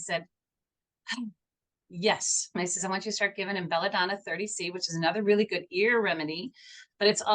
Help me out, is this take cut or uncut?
cut